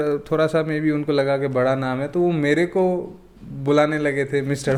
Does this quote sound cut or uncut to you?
uncut